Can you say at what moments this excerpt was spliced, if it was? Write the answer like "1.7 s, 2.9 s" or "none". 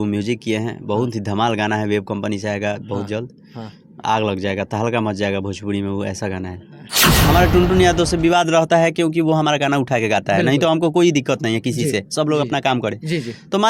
7.1 s